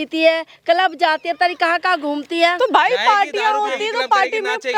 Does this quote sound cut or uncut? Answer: uncut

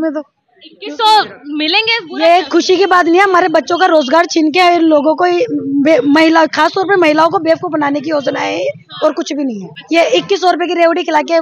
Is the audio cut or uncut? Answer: cut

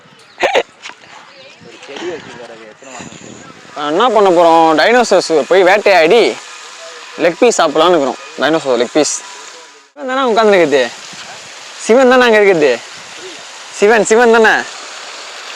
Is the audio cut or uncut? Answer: cut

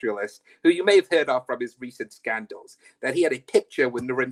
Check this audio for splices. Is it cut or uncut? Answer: uncut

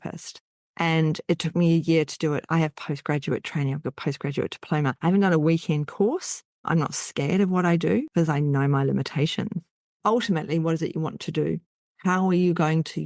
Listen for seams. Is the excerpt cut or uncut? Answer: cut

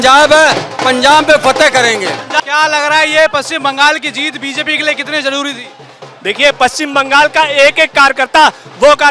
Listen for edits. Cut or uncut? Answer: cut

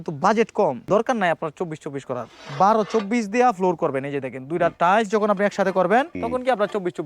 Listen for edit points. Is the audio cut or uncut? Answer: cut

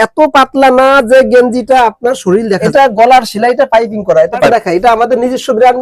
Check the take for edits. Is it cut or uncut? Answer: cut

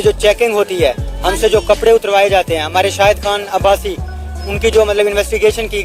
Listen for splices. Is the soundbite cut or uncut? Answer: uncut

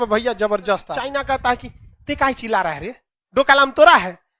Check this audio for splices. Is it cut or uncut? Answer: cut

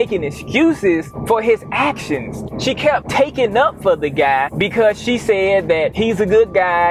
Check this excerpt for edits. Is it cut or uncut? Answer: cut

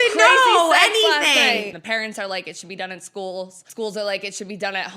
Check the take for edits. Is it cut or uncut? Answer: cut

